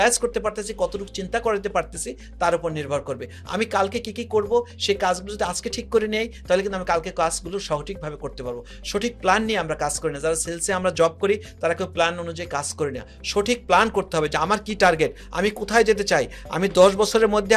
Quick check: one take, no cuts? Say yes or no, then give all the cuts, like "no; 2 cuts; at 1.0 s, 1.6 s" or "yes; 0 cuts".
yes; 0 cuts